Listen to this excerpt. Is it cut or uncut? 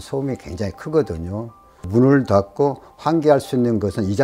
uncut